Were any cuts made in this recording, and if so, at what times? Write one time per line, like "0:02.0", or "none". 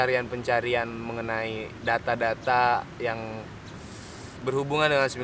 none